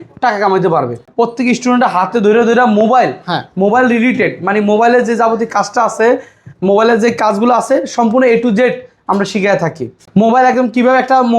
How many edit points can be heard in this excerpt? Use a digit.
1